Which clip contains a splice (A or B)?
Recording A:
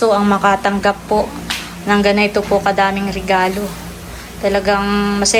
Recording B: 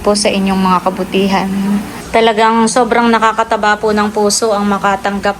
B